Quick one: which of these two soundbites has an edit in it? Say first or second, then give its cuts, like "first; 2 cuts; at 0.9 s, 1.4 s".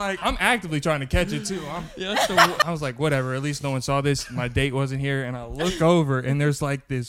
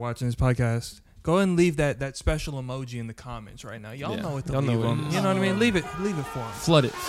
first; 1 cut; at 2.6 s